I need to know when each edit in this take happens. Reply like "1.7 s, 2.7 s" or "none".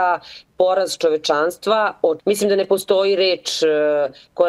2.2 s